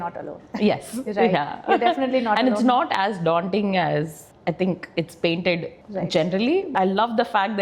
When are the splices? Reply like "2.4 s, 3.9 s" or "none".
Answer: 6.7 s